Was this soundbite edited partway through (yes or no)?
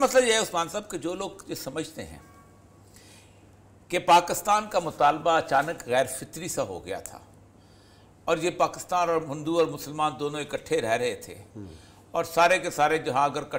no